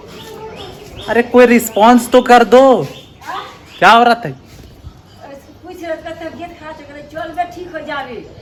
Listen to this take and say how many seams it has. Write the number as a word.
zero